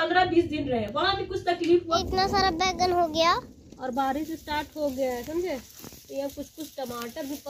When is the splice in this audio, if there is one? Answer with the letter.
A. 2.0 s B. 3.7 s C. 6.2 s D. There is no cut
A